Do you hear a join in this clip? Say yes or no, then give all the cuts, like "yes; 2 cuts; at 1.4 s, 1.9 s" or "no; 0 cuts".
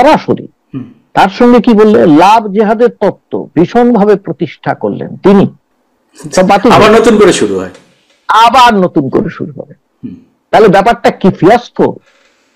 yes; 1 cut; at 5.6 s